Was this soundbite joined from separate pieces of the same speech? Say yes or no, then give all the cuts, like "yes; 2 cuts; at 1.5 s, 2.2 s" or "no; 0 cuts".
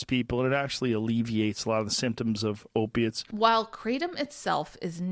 yes; 1 cut; at 3.3 s